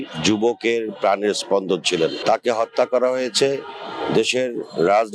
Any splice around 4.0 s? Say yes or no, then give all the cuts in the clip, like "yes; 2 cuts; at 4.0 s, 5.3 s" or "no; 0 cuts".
no; 1 cut; at 2.2 s